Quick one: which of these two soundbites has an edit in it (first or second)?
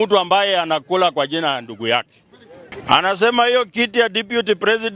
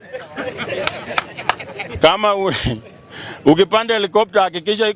first